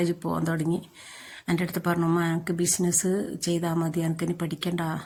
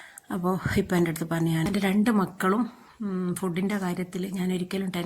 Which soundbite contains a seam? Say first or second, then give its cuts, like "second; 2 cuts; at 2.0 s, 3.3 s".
second; 1 cut; at 1.7 s